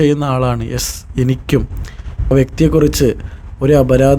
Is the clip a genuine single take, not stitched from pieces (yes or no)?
no